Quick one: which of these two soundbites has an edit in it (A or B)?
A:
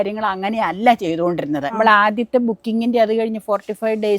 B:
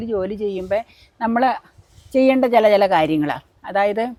A